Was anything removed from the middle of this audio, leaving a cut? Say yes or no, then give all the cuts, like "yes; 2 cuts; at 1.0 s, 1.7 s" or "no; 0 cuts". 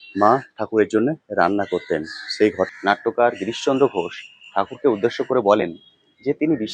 yes; 1 cut; at 2.7 s